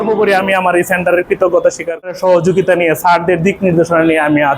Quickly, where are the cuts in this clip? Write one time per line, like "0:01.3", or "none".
0:02.1